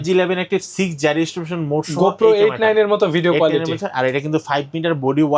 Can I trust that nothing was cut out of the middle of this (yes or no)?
yes